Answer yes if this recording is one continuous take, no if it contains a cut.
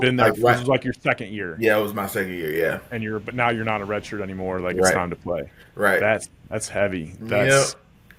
yes